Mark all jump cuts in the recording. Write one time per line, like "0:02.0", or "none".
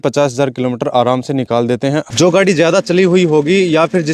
0:02.0